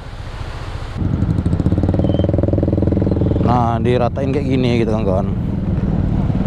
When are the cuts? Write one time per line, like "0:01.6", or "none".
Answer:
0:01.0